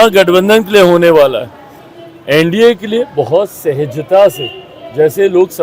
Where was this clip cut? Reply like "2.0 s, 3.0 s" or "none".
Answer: none

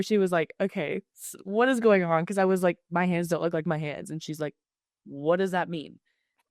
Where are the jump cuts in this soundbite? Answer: none

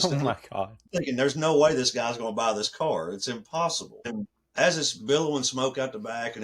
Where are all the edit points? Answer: 0.9 s, 4.1 s

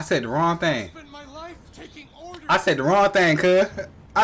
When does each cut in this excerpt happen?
none

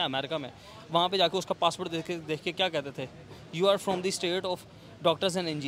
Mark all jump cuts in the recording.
none

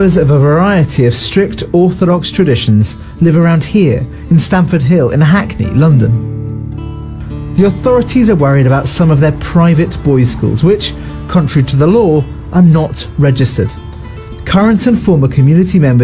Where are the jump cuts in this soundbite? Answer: 10.8 s

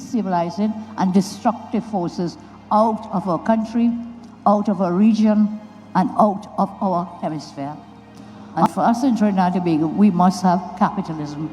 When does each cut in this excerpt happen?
8.7 s

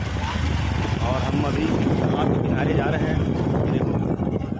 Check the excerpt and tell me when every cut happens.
3.3 s

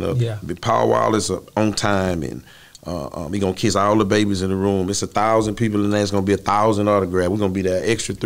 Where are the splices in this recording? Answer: none

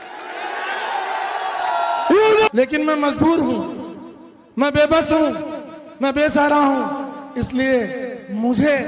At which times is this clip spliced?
2.5 s

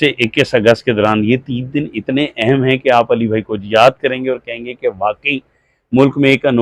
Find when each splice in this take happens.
none

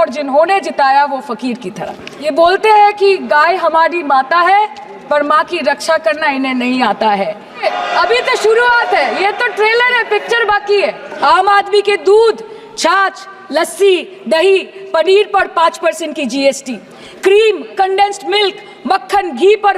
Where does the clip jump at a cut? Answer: 2.3 s, 7.6 s, 11.1 s

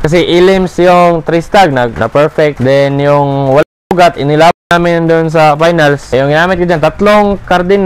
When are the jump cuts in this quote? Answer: 2.5 s, 6.0 s

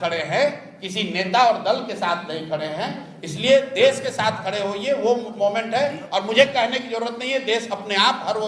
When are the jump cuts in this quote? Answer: none

